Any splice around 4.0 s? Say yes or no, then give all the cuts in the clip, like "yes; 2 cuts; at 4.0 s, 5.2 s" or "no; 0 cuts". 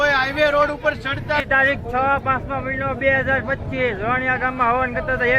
no; 1 cut; at 1.4 s